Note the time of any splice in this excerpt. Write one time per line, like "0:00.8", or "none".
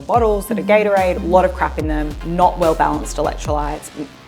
0:01.2
0:02.2